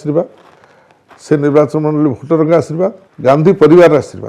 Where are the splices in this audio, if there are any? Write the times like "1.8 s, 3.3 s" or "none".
3.1 s